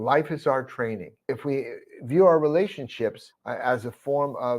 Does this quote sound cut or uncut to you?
cut